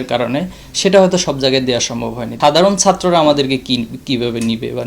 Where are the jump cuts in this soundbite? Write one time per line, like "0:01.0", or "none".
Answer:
0:02.3